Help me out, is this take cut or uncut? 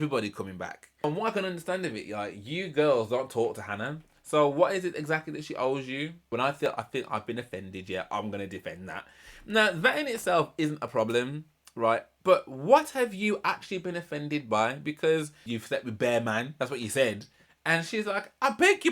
cut